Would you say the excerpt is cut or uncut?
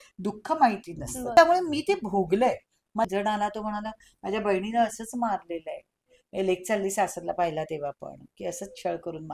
cut